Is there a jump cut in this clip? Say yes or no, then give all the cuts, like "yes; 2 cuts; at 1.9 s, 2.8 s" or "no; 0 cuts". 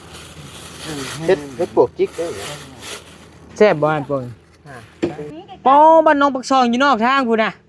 yes; 1 cut; at 5.3 s